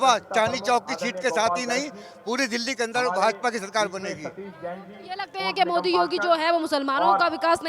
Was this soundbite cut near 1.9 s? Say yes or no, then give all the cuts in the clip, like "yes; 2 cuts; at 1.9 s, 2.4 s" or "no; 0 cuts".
no; 0 cuts